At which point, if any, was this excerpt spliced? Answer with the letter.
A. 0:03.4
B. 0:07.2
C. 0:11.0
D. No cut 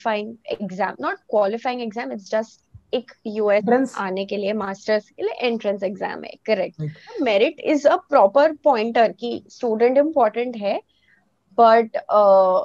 B